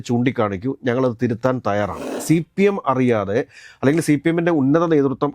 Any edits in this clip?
yes; 1 cut; at 2.1 s

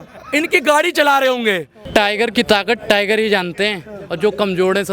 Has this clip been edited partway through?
yes; 1 cut; at 1.7 s

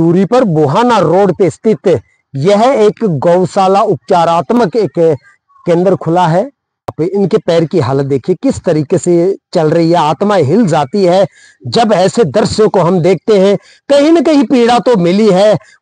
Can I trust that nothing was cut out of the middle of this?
no; 1 cut; at 6.9 s

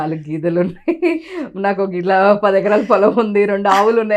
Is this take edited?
no; 0 cuts

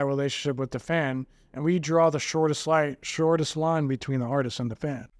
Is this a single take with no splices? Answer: yes; 0 cuts

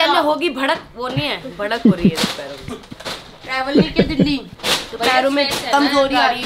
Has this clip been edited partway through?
no; 0 cuts

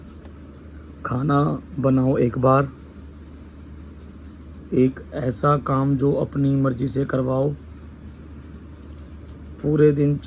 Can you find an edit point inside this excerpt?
no; 0 cuts

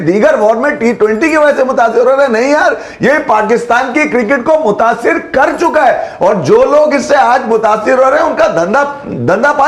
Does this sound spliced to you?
no; 0 cuts

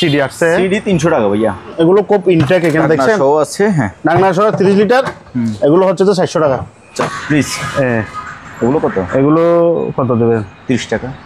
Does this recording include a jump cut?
yes; 2 cuts; at 1.7 s, 7.2 s

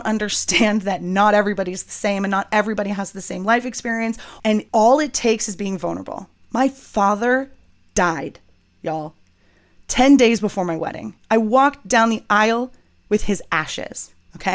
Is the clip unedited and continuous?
no; 1 cut; at 4.4 s

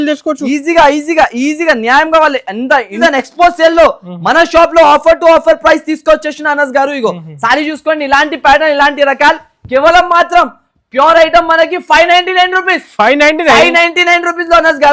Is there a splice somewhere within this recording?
yes; 1 cut; at 2.9 s

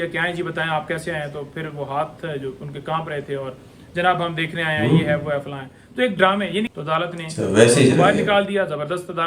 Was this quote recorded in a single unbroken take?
no; 1 cut; at 6.7 s

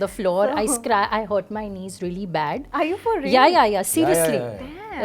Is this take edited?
no; 0 cuts

